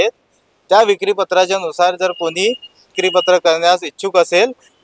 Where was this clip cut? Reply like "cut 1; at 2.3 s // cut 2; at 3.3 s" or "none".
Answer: cut 1; at 2.9 s